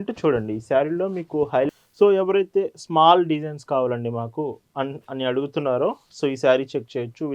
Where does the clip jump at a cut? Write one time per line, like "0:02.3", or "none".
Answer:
0:01.7

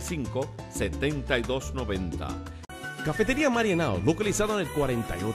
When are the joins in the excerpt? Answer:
0:02.5

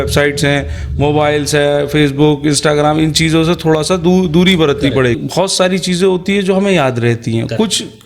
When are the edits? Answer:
0:05.2

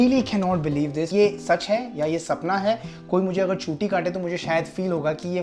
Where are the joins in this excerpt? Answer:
none

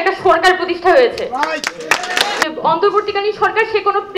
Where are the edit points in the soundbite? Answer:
0:02.4

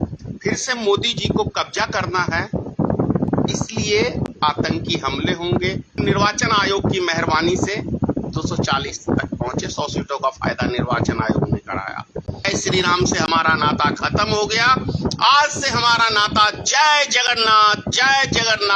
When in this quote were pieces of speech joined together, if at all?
0:06.0
0:12.4

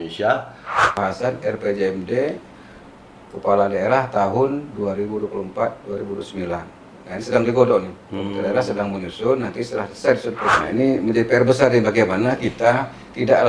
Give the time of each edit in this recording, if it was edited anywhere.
0:01.0
0:10.5

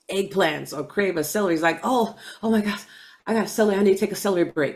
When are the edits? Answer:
none

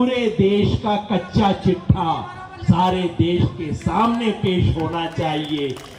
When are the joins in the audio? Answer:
none

